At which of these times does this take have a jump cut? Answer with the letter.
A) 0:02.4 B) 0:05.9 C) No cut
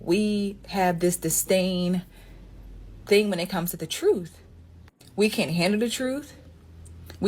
B